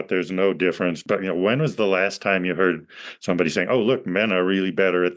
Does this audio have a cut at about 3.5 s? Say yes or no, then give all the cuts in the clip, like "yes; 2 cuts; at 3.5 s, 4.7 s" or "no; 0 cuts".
no; 1 cut; at 1.0 s